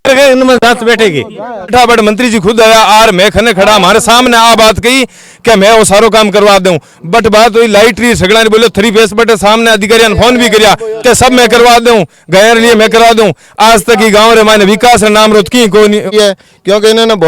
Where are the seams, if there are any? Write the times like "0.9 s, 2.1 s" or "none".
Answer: 1.7 s, 16.1 s